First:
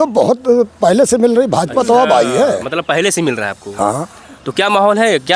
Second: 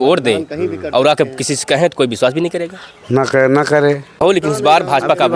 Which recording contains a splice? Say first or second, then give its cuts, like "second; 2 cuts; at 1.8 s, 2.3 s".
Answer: second; 1 cut; at 4.4 s